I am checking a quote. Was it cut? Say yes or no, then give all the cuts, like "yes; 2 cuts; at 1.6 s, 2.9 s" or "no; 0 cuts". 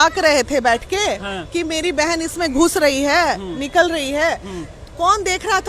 no; 0 cuts